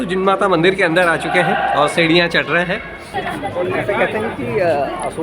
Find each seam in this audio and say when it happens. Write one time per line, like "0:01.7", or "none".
0:03.0